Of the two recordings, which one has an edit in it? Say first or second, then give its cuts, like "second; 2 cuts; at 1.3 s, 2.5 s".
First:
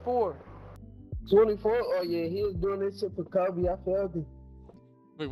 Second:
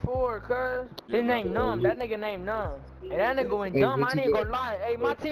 second; 2 cuts; at 1.0 s, 2.9 s